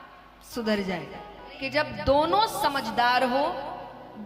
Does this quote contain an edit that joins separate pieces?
yes; 1 cut; at 1.5 s

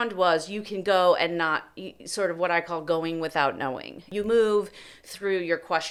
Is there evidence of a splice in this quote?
no; 0 cuts

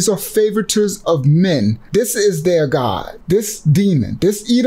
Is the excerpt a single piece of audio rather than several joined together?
yes; 0 cuts

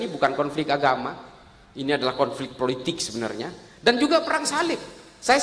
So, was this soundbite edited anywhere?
no; 0 cuts

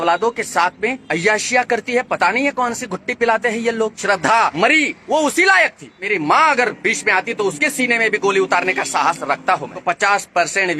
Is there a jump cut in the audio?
yes; 4 cuts; at 1.0 s, 4.3 s, 6.1 s, 9.7 s

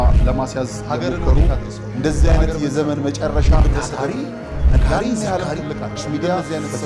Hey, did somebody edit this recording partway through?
no; 0 cuts

